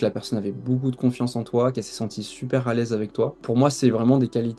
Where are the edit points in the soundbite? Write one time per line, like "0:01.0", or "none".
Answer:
none